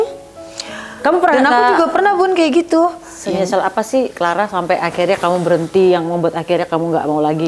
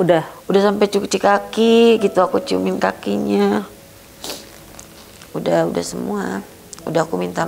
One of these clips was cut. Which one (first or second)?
first